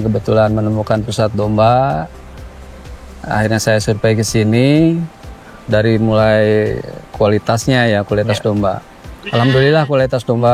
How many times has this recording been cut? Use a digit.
0